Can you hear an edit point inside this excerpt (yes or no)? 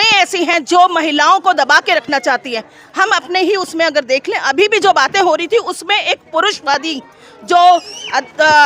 no